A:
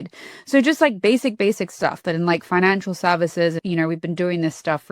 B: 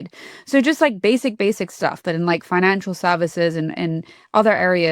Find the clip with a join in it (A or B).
A